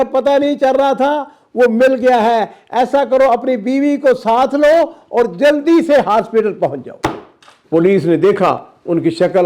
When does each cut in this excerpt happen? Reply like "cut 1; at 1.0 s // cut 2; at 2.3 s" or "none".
cut 1; at 7.6 s